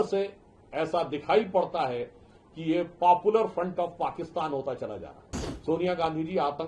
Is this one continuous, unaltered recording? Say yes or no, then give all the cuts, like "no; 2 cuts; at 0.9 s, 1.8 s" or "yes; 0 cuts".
no; 1 cut; at 5.5 s